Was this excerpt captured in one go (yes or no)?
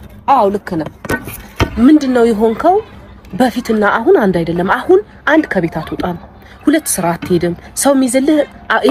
yes